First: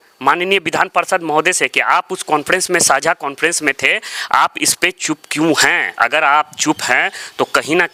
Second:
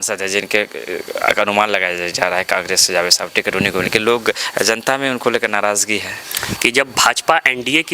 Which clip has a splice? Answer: second; 1 cut; at 6.4 s

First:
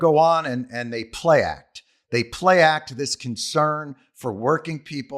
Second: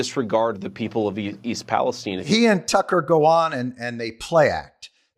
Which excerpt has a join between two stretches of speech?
second; 1 cut; at 2.1 s

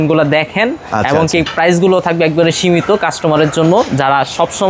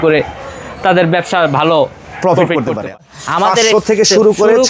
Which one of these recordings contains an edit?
second; 1 cut; at 2.9 s

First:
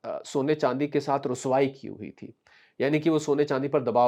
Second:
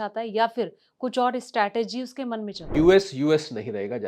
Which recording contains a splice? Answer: second; 1 cut; at 2.6 s

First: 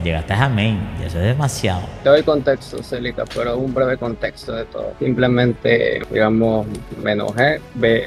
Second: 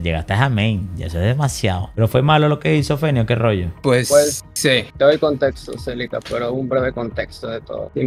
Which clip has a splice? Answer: first; 2 cuts; at 1.9 s, 6.0 s

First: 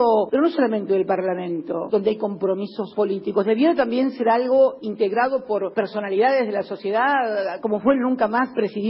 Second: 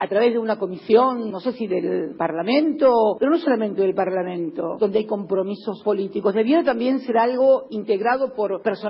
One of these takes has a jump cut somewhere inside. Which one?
second; 1 cut; at 1.6 s

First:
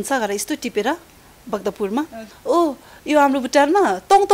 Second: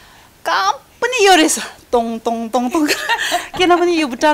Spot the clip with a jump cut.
first; 1 cut; at 2.3 s

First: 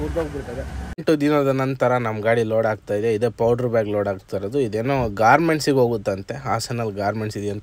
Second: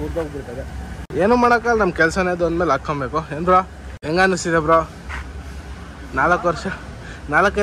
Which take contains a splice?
first; 1 cut; at 1.0 s

